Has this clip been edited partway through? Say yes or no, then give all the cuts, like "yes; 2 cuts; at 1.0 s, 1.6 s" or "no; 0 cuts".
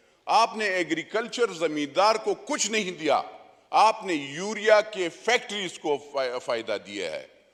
no; 0 cuts